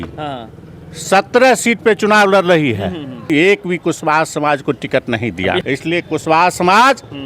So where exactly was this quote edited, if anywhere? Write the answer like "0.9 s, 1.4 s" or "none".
3.2 s, 5.6 s